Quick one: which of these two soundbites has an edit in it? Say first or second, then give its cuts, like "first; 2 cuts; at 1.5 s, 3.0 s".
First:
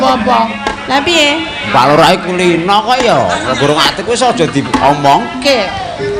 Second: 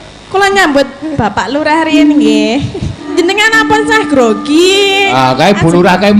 second; 1 cut; at 3.1 s